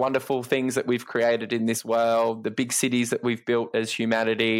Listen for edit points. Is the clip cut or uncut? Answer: cut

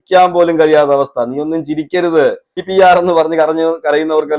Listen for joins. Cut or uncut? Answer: cut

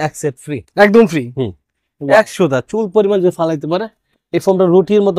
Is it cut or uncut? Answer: uncut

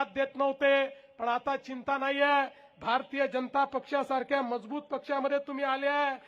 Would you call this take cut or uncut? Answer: uncut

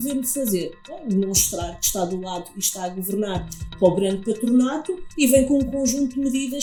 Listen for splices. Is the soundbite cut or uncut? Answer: uncut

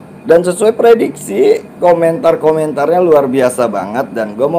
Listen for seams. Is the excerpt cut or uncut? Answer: uncut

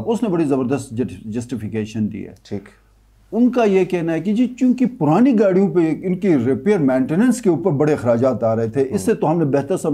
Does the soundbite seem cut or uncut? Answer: uncut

